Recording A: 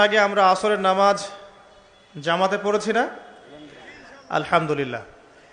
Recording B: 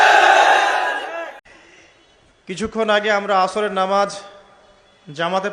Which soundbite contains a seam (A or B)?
B